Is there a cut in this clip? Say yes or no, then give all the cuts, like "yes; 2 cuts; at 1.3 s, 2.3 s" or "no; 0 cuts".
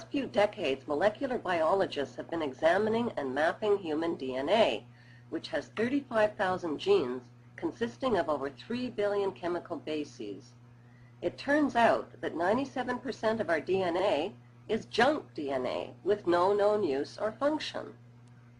no; 0 cuts